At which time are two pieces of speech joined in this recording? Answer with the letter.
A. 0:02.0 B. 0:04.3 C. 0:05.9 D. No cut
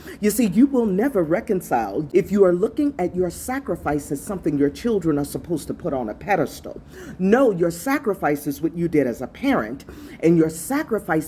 A